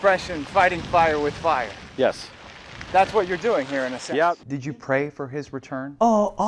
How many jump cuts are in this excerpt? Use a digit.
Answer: 1